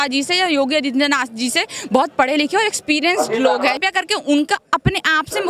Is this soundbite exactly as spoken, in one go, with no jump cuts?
no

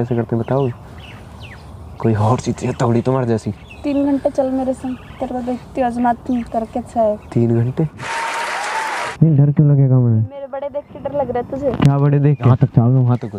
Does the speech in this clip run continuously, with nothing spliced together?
no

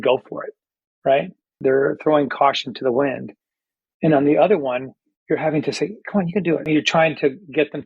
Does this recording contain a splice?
yes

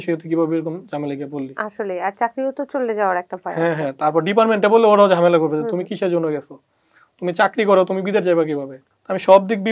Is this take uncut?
yes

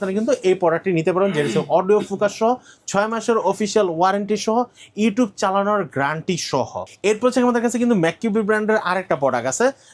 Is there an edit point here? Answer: no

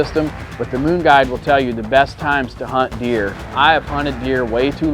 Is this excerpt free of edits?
no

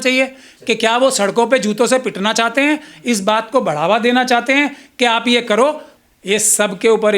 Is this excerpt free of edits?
no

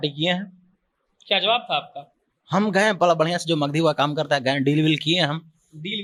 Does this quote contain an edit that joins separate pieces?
no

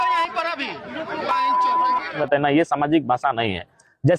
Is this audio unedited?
no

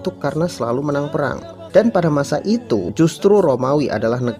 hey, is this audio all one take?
no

